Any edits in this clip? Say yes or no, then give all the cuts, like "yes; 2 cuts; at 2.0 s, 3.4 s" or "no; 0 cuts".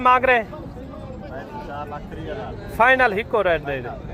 no; 0 cuts